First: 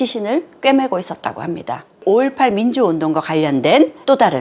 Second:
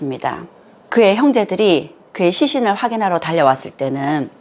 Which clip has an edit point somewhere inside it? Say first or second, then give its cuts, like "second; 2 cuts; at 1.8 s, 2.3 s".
first; 1 cut; at 2.0 s